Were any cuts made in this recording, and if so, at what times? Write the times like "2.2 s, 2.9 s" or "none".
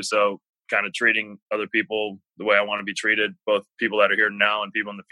none